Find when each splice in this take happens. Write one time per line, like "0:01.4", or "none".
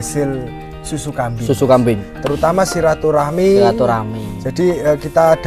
0:02.1